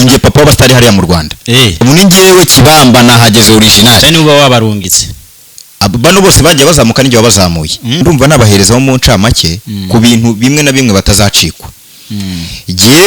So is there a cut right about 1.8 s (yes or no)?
yes